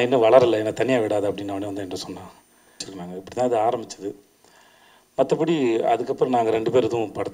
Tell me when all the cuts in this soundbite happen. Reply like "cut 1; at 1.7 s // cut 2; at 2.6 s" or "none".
cut 1; at 2.9 s